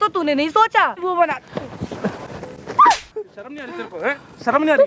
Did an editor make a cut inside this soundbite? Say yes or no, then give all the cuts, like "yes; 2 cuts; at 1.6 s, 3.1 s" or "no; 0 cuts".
yes; 1 cut; at 1.0 s